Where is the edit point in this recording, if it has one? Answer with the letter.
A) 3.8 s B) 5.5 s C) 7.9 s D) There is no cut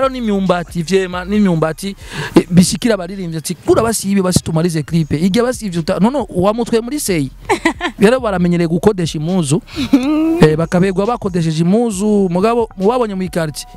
C